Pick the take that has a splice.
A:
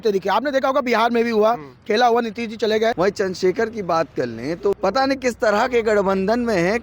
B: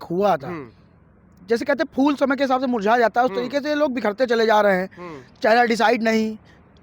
A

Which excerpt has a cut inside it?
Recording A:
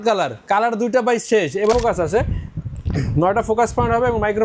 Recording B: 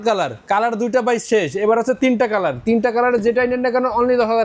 A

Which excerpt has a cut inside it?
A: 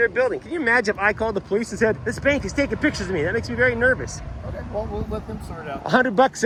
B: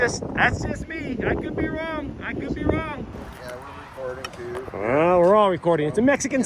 B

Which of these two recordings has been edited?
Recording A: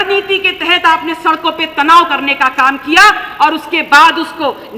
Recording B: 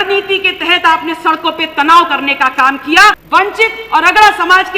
B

